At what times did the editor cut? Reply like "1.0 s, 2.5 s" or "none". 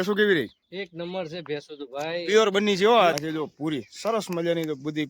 3.2 s